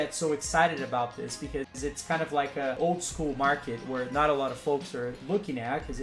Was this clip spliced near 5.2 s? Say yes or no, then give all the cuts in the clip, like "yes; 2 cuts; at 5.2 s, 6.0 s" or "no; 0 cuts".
yes; 2 cuts; at 2.8 s, 5.2 s